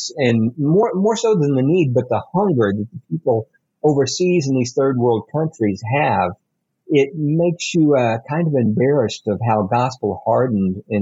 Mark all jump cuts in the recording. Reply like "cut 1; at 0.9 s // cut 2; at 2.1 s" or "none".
none